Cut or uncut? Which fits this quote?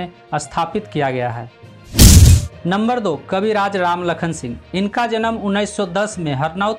uncut